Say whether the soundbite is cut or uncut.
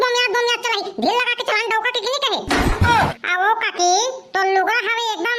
cut